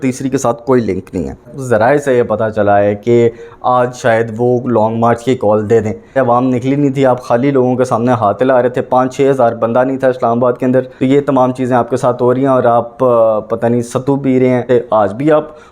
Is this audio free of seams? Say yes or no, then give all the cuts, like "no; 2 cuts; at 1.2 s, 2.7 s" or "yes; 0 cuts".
no; 4 cuts; at 1.5 s, 6.1 s, 10.9 s, 14.7 s